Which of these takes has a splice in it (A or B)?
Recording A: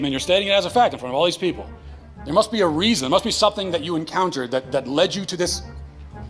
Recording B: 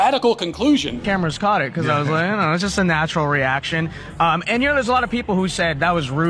B